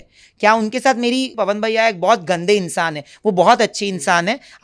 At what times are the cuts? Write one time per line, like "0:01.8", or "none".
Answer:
0:01.3